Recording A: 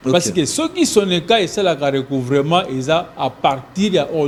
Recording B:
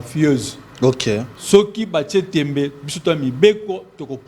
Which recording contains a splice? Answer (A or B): B